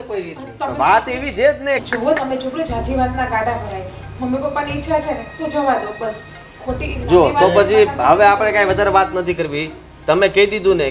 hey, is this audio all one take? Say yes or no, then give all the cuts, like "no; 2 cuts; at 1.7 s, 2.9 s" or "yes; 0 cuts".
no; 1 cut; at 1.8 s